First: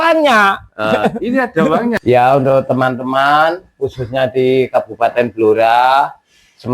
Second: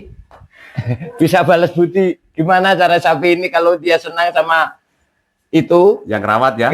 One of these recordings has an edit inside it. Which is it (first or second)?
first